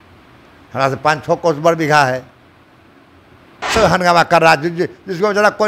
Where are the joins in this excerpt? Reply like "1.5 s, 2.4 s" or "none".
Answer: 3.6 s